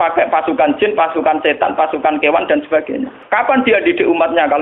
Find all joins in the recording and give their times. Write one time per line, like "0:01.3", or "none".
0:03.1